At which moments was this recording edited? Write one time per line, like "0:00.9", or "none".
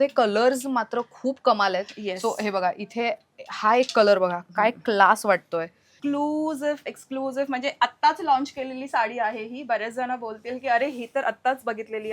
0:05.9